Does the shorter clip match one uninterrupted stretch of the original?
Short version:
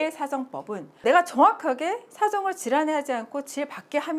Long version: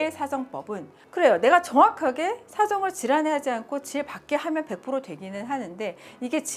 no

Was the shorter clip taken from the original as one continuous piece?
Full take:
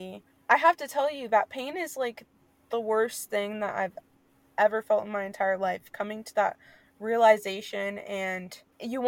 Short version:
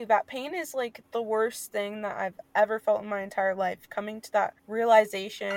no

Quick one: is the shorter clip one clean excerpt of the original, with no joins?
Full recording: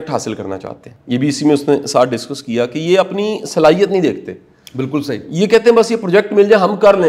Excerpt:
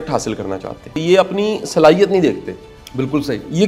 no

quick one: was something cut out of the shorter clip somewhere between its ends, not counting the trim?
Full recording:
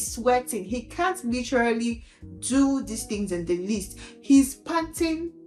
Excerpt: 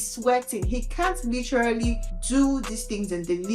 yes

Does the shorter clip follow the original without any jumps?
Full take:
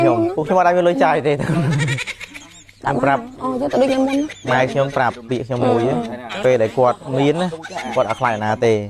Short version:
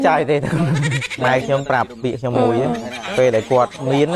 no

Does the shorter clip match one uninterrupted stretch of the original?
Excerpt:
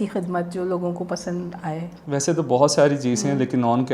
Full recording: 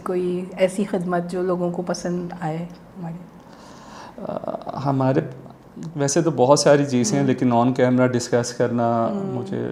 no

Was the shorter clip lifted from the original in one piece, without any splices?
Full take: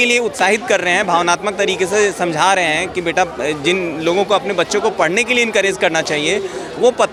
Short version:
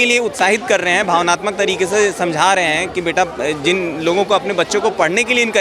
yes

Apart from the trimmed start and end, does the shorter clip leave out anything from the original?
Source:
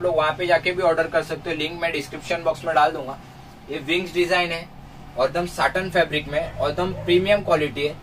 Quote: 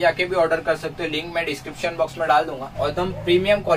yes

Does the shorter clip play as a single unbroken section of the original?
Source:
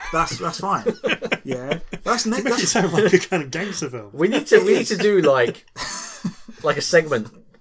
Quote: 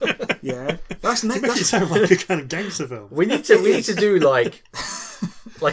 yes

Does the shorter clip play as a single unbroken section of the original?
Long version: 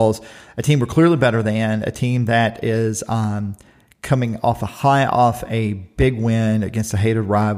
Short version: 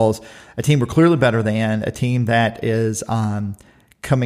yes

